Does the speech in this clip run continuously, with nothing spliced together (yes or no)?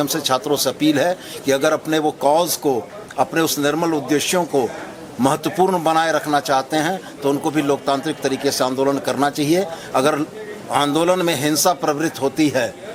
yes